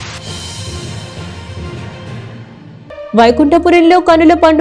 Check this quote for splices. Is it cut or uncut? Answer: cut